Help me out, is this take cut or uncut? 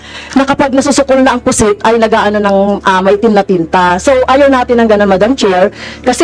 uncut